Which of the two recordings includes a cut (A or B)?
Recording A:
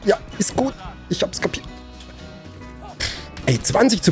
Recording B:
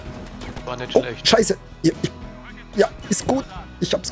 A